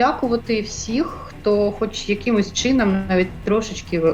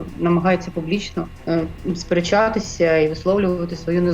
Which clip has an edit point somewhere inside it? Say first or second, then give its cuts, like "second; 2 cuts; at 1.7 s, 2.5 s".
second; 1 cut; at 1.3 s